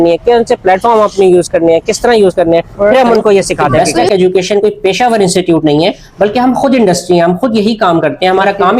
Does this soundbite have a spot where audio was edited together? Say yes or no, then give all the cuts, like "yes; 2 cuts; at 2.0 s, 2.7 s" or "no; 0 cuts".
yes; 1 cut; at 3.8 s